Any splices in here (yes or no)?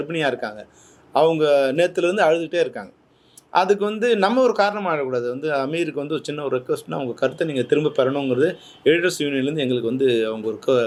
no